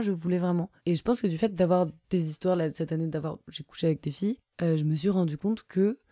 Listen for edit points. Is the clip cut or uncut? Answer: cut